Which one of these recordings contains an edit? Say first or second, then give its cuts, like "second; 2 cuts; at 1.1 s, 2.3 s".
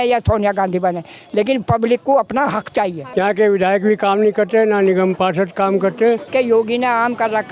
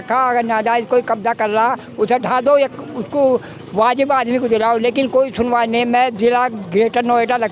first; 2 cuts; at 3.0 s, 6.3 s